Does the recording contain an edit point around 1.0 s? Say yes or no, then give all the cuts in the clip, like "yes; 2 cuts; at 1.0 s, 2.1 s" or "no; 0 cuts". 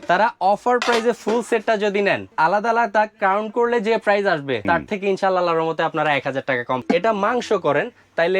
no; 3 cuts; at 2.3 s, 4.6 s, 6.8 s